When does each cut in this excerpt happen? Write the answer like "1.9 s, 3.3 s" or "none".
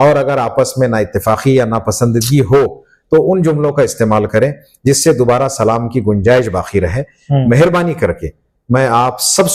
none